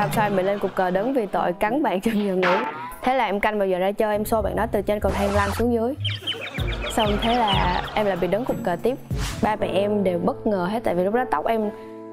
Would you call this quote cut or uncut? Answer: cut